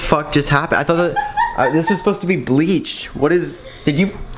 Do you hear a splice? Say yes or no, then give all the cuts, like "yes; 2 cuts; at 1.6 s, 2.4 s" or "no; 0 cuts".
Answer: no; 0 cuts